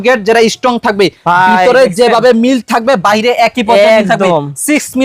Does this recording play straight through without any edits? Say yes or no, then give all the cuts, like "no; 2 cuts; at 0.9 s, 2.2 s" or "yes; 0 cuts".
yes; 0 cuts